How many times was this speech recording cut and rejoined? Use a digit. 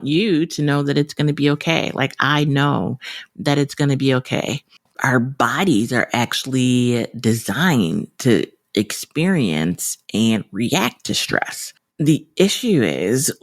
1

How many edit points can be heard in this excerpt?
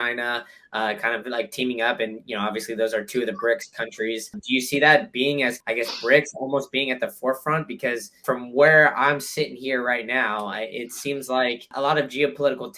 4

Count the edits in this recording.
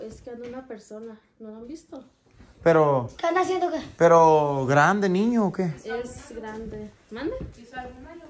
0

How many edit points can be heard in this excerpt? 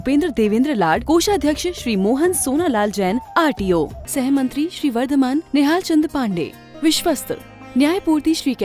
0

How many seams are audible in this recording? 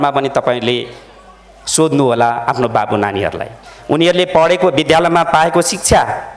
0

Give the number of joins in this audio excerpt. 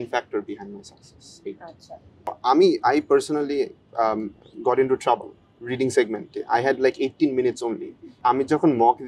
2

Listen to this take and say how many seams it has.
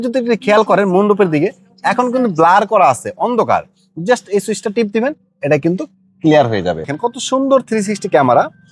1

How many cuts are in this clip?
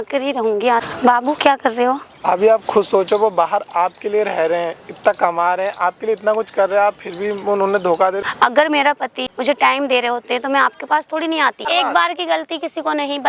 5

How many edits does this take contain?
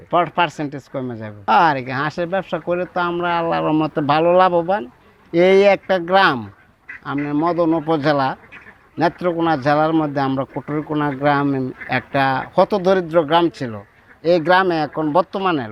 1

